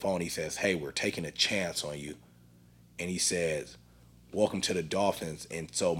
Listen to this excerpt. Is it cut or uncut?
uncut